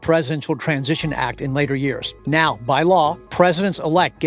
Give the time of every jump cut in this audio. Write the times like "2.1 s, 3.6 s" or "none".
2.1 s, 3.2 s